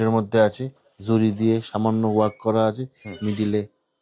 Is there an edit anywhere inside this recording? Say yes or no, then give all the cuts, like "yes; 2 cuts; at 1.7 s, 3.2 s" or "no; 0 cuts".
no; 0 cuts